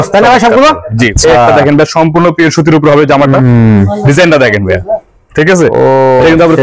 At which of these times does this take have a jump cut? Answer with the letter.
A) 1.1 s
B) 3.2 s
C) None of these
A